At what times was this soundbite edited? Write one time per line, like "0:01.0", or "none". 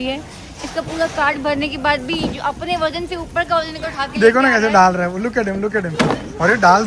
none